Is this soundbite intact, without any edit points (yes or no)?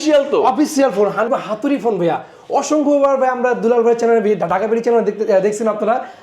no